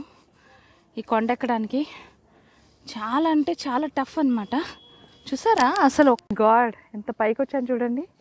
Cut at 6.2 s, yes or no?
yes